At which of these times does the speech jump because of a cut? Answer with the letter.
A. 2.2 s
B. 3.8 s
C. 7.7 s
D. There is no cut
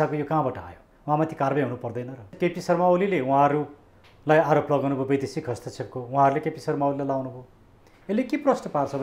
A